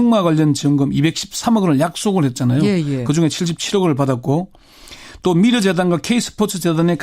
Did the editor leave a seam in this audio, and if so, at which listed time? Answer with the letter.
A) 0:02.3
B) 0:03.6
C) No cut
B